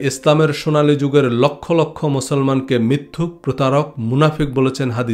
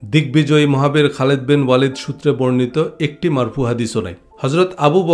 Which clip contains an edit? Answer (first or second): second